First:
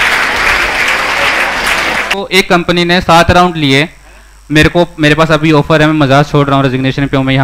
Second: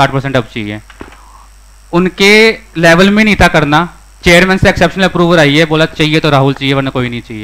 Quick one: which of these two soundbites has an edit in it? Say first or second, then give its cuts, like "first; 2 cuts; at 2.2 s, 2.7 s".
first; 1 cut; at 2.3 s